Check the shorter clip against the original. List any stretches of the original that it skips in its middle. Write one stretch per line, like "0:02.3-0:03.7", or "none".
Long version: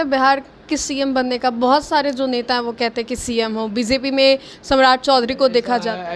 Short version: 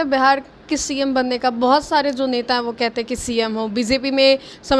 none